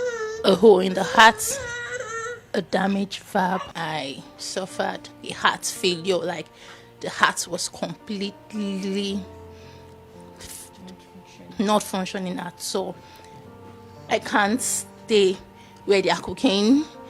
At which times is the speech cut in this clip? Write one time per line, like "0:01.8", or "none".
0:03.7
0:05.1

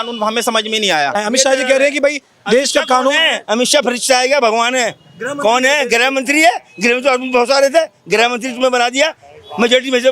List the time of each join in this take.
0:01.2

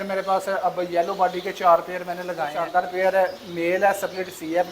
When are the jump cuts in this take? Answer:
0:02.6

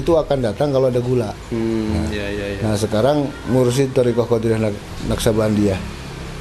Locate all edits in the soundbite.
none

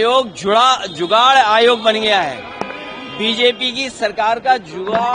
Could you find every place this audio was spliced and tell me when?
none

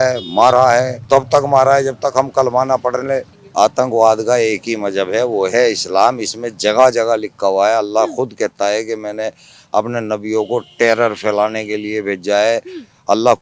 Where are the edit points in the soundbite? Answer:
0:01.0
0:03.4

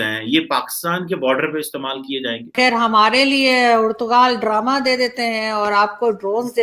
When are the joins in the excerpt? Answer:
0:02.5

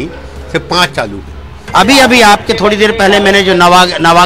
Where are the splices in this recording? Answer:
0:01.6

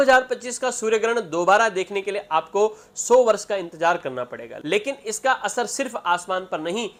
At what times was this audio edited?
none

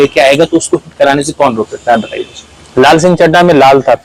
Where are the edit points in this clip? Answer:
none

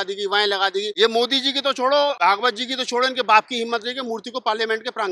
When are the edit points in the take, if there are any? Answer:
0:00.9
0:02.2

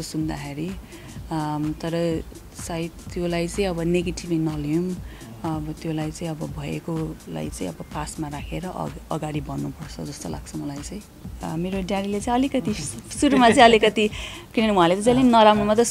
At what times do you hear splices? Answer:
0:11.3

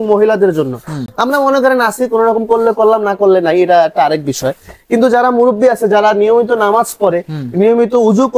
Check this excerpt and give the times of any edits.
none

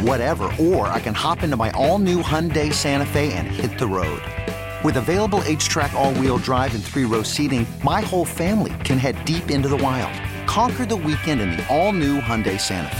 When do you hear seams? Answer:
none

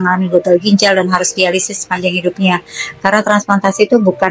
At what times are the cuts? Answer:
none

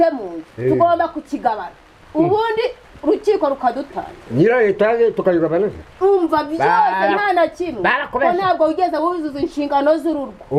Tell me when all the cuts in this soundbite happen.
none

